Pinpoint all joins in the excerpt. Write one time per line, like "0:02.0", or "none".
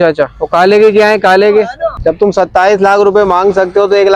0:02.0

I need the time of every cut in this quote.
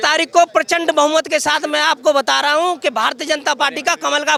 none

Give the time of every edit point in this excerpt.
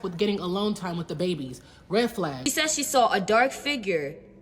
0:02.4

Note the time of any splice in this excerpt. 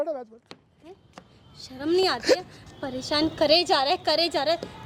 none

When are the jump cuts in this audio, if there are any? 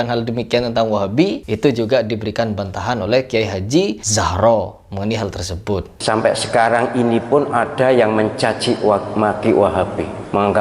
0:01.5
0:04.0
0:05.9

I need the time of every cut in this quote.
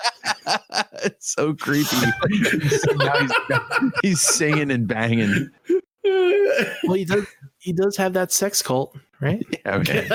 none

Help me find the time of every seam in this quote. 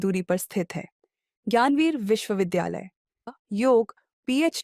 0:03.3

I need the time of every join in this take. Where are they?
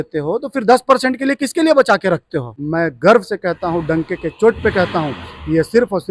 0:02.5

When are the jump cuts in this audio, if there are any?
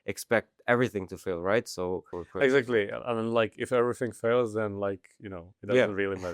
0:02.1

